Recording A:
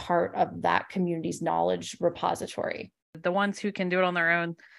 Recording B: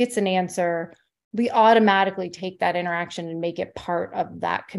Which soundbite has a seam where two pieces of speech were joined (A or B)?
A